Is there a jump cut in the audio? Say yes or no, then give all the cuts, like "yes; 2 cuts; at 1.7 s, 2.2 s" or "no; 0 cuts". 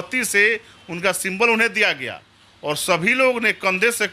no; 0 cuts